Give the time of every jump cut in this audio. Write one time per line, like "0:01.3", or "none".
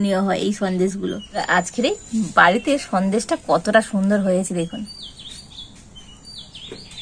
0:01.5